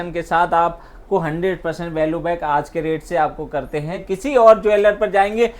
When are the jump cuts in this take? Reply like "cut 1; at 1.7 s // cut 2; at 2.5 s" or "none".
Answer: cut 1; at 4.0 s